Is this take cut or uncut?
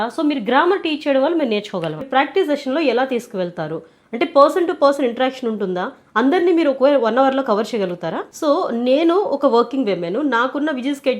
cut